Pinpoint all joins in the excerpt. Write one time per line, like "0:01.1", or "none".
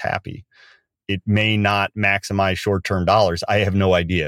0:00.9